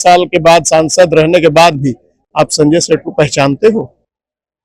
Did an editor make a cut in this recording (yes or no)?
no